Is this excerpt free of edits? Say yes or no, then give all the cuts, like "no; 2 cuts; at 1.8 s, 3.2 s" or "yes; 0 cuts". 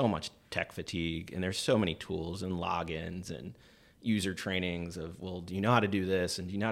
yes; 0 cuts